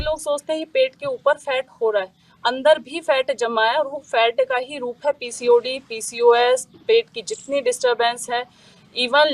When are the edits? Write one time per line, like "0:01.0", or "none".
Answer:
none